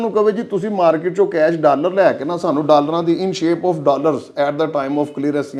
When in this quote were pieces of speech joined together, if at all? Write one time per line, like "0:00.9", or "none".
none